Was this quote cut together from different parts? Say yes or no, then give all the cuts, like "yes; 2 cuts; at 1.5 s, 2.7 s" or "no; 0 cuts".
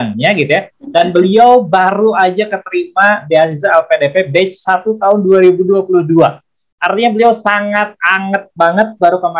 no; 0 cuts